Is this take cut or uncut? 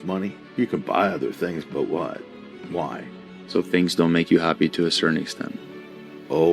uncut